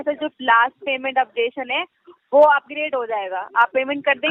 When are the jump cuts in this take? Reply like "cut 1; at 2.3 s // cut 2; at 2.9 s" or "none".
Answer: none

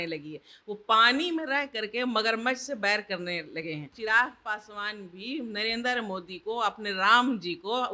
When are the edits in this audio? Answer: cut 1; at 3.9 s

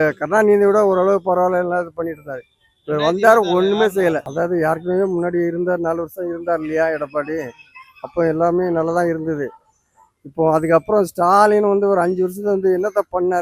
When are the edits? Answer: cut 1; at 4.2 s

